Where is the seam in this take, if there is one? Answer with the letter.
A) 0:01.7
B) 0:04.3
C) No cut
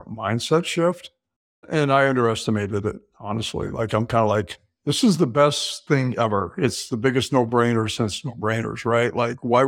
A